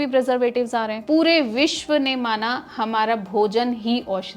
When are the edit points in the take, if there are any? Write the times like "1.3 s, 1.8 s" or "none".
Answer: 1.0 s